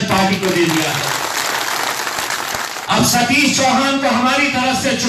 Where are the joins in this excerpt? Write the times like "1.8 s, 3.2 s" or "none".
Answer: 2.7 s